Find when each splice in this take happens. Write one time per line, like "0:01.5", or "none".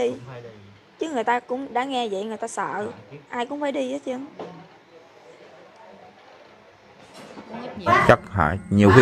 0:07.9